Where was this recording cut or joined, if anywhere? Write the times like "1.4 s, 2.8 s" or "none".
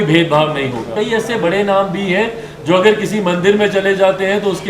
0.9 s